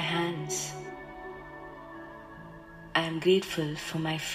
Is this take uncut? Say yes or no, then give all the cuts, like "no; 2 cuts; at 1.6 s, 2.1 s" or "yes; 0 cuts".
yes; 0 cuts